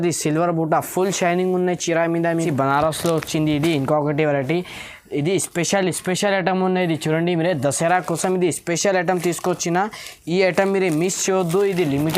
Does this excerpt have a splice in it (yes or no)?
yes